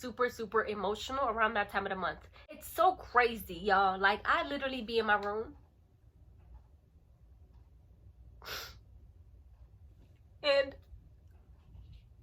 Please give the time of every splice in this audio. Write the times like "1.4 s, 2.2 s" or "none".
2.6 s